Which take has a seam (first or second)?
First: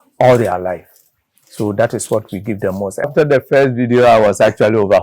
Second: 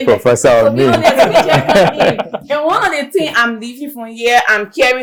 first